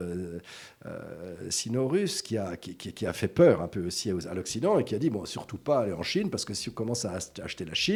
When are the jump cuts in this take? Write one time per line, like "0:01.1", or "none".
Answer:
none